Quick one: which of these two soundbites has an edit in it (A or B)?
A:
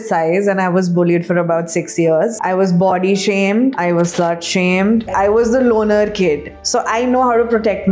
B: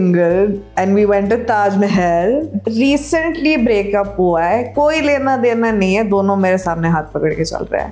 A